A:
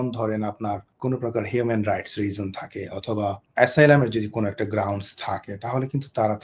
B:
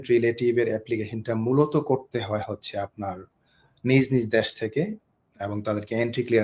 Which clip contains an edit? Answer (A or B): A